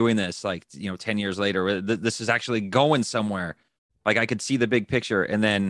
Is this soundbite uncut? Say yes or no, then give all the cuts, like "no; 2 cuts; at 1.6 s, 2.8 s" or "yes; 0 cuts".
yes; 0 cuts